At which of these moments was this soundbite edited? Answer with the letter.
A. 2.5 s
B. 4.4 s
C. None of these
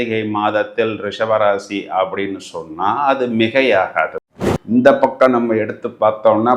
B